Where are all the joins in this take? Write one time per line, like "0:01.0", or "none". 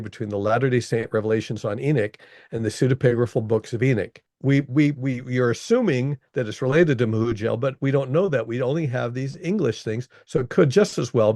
0:04.3